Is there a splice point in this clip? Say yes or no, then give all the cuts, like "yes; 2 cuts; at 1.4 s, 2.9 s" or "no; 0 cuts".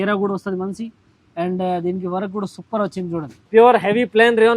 yes; 1 cut; at 3.3 s